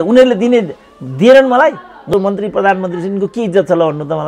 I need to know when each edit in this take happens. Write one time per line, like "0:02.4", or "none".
0:02.1